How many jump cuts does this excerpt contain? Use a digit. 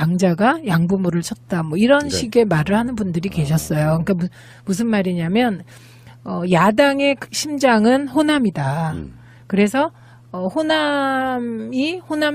0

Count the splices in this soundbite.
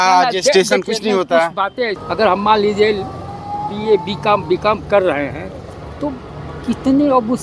1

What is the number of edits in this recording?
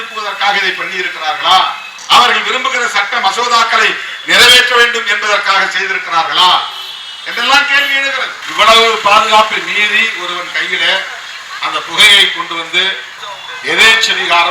2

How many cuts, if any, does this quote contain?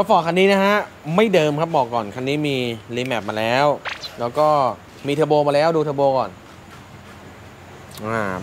0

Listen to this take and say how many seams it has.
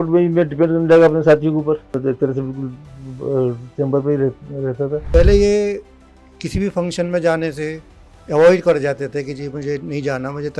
2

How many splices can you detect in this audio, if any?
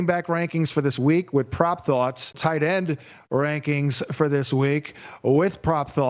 1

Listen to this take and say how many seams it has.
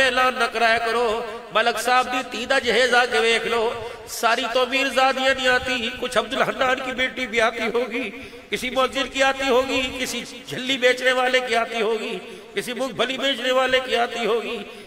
0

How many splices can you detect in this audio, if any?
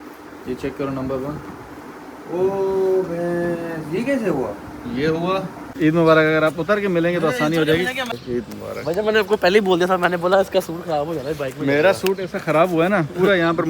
2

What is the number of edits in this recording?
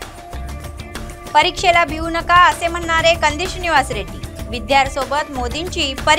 0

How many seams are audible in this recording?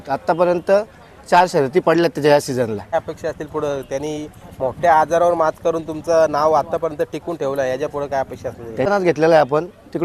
2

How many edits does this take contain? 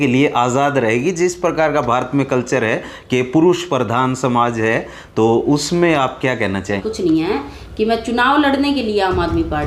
1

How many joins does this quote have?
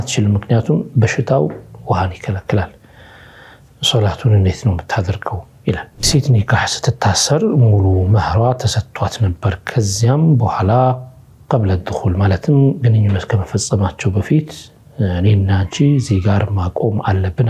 1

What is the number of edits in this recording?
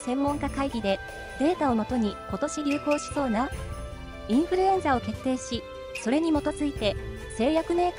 1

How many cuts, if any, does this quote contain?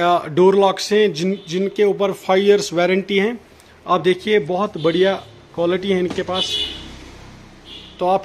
0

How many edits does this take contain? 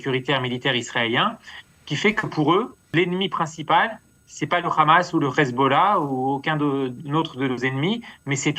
1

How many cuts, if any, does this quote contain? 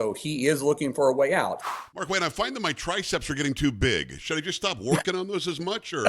1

